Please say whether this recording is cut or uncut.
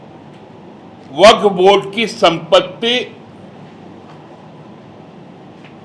uncut